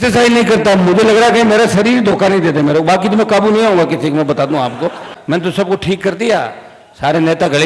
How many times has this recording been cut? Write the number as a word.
one